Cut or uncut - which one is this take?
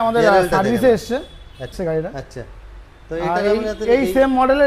cut